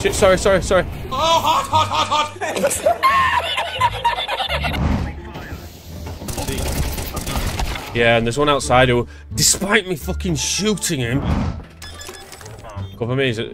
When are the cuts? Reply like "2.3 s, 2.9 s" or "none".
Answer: 4.8 s, 11.2 s